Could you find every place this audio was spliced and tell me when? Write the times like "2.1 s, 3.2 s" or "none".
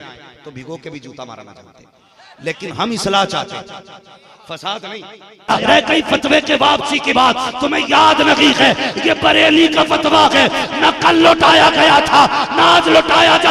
5.4 s

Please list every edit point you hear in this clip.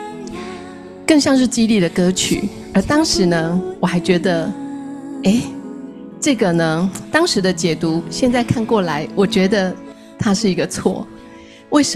1.0 s

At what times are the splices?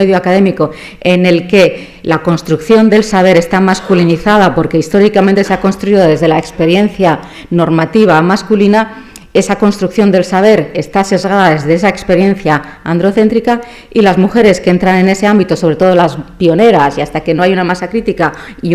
1.8 s

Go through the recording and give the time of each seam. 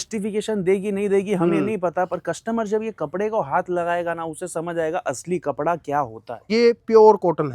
6.5 s

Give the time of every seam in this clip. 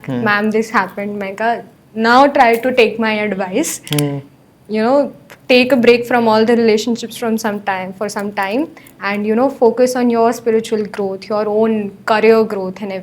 none

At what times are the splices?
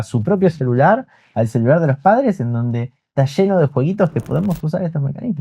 none

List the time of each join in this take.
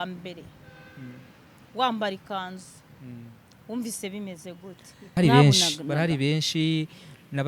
5.1 s

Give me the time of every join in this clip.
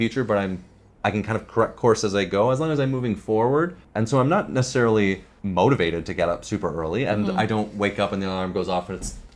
3.8 s, 5.3 s

